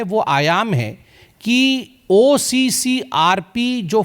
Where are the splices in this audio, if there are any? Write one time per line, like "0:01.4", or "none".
none